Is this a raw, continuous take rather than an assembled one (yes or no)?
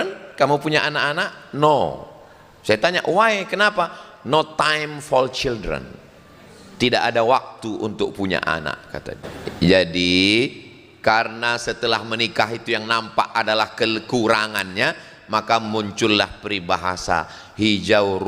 no